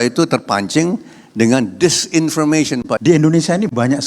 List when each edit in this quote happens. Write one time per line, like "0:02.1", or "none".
0:03.0